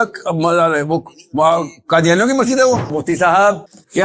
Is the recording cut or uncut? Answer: cut